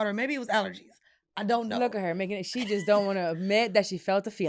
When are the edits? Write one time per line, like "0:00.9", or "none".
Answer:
none